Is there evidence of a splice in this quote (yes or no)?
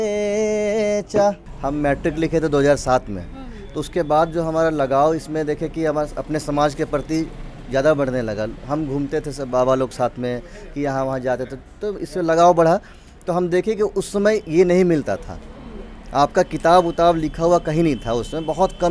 yes